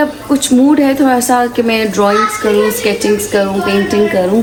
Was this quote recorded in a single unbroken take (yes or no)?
yes